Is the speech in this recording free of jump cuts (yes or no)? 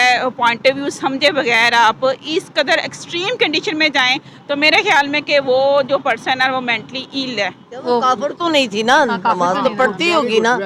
no